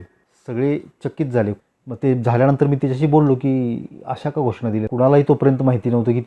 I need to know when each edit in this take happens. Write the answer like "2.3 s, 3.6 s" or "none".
1.6 s, 4.9 s